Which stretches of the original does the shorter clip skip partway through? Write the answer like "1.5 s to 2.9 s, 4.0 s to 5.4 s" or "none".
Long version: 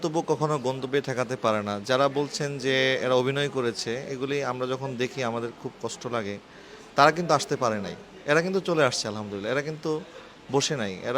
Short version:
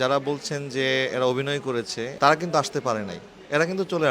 4.0 s to 6.9 s